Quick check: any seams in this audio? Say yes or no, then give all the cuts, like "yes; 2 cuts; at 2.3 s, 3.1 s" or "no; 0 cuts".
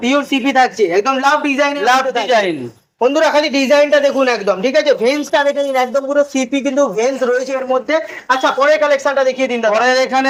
no; 0 cuts